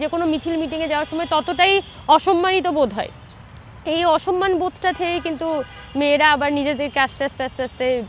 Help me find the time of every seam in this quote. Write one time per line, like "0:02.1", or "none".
none